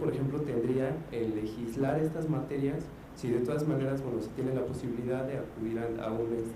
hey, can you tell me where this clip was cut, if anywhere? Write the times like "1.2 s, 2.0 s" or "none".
3.7 s